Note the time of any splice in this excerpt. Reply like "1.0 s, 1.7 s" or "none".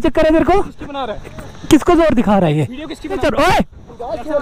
3.0 s

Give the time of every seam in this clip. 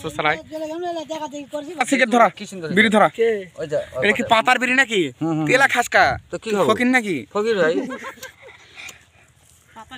1.8 s

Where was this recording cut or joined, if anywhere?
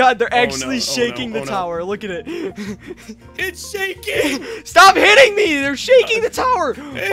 3.7 s

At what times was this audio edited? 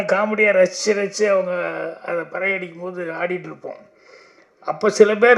none

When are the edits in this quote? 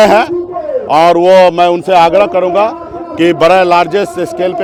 none

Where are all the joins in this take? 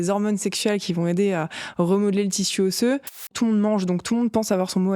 3.3 s

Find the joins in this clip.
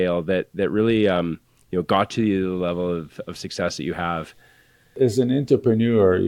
4.9 s

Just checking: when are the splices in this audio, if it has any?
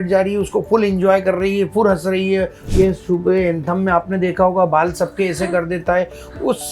2.6 s

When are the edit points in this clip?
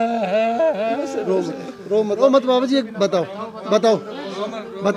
2.2 s

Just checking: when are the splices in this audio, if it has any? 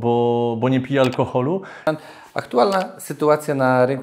1.9 s

